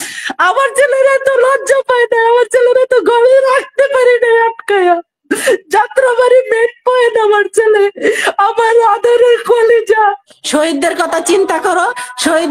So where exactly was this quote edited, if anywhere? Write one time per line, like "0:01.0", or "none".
0:10.2

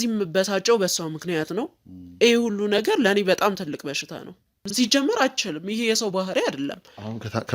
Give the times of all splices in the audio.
0:04.7

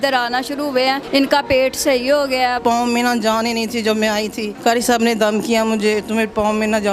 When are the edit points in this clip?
0:01.0
0:02.6
0:04.5

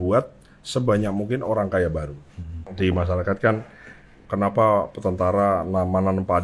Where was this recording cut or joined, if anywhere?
0:02.7

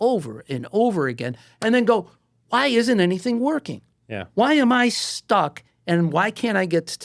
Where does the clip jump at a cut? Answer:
none

